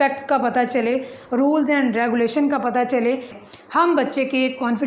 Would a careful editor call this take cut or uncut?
cut